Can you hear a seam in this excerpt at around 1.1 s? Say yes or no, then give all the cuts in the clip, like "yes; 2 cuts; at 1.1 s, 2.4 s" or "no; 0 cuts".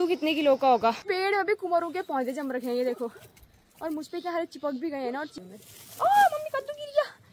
yes; 2 cuts; at 1.1 s, 5.3 s